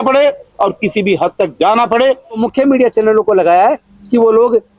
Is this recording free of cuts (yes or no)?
no